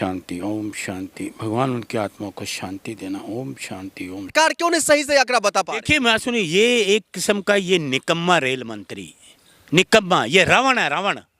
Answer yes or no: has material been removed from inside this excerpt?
yes